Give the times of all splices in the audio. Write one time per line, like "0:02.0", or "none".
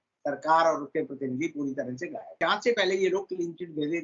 0:02.4